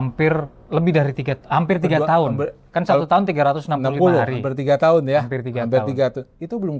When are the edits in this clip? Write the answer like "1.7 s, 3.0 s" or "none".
none